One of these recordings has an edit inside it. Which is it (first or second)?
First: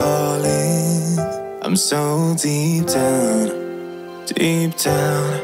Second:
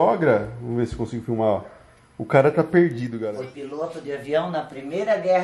second